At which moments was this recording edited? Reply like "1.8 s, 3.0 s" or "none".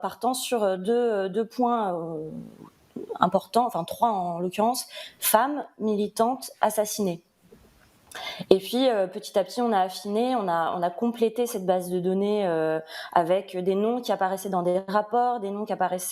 none